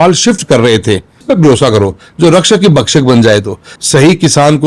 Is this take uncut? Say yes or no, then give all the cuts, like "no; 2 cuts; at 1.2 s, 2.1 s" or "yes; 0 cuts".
no; 2 cuts; at 1.2 s, 3.7 s